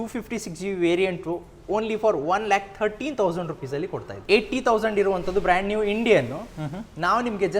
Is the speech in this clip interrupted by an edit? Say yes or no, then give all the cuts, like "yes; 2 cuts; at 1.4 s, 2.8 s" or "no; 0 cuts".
yes; 1 cut; at 4.1 s